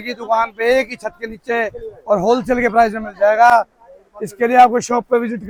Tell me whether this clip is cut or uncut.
uncut